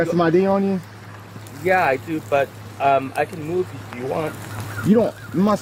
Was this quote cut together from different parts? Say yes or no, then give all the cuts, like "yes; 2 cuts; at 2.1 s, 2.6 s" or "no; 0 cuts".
no; 0 cuts